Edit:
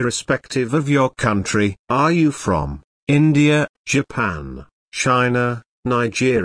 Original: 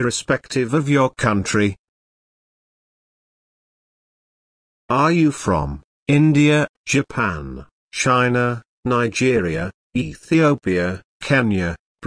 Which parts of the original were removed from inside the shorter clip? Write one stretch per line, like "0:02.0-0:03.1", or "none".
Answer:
0:01.8-0:04.8